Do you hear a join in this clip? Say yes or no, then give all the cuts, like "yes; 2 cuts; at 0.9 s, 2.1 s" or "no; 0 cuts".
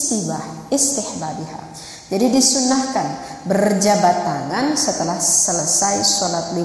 no; 0 cuts